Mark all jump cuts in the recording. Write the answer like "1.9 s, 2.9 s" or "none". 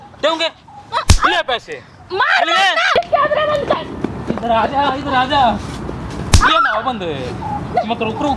3.0 s

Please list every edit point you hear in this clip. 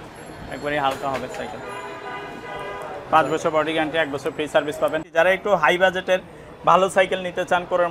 5.1 s

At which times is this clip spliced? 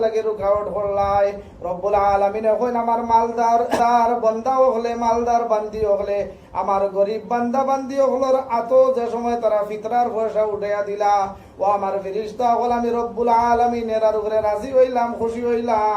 3.8 s

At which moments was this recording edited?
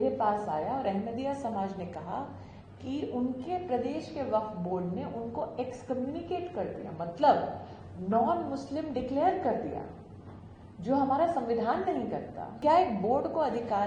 12.6 s

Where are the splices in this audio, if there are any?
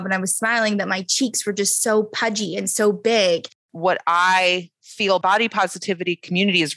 3.7 s, 5.2 s

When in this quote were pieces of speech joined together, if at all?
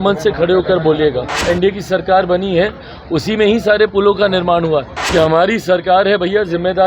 1.3 s, 5.0 s

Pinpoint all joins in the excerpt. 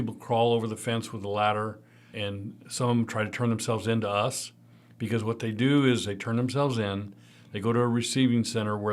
2.1 s

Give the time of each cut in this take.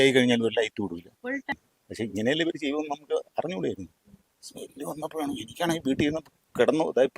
1.6 s

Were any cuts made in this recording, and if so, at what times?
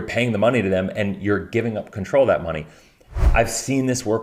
3.2 s

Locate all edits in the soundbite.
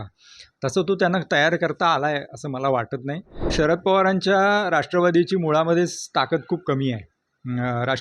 3.5 s

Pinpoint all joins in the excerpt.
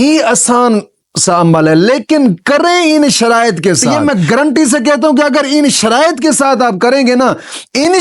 3.9 s

